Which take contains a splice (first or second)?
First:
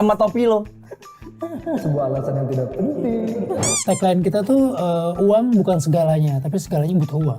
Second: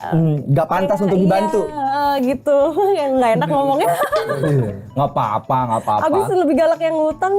first